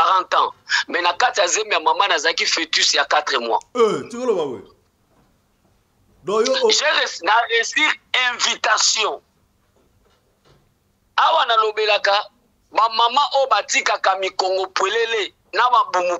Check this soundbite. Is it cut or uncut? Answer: uncut